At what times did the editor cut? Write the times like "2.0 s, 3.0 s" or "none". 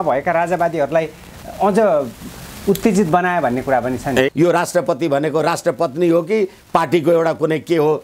4.3 s